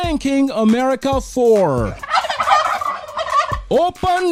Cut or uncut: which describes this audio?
uncut